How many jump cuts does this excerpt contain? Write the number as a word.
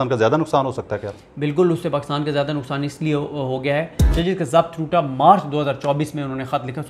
one